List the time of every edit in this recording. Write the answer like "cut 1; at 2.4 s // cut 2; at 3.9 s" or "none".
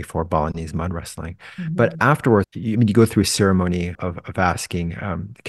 cut 1; at 2.5 s // cut 2; at 3.9 s